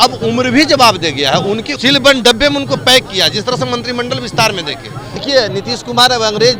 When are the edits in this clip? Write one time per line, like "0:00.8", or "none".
0:01.7
0:05.2